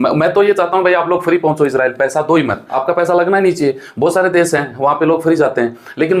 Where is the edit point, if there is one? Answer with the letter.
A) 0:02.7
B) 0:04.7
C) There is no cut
A